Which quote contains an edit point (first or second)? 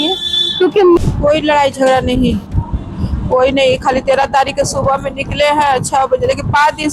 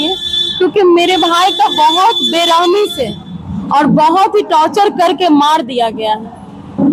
first